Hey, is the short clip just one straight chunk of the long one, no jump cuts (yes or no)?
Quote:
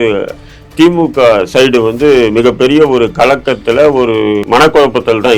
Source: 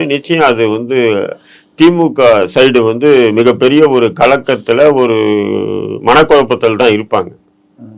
no